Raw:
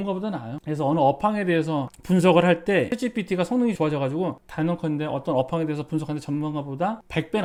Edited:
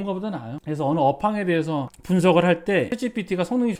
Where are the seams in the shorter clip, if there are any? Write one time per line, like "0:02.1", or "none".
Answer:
none